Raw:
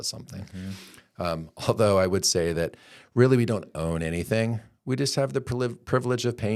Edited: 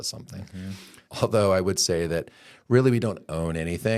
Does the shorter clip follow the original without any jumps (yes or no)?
no